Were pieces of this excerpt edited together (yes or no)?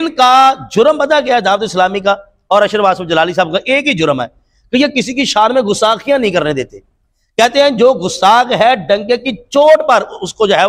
no